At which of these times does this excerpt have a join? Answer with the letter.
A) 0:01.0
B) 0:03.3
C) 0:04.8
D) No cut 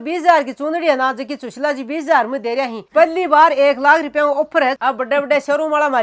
D